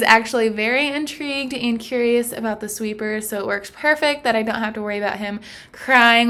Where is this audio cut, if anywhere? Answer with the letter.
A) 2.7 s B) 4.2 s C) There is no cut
C